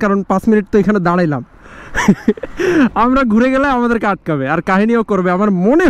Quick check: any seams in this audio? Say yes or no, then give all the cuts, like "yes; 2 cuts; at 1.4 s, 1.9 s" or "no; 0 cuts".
no; 0 cuts